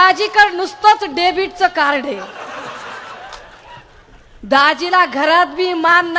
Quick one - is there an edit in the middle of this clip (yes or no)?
no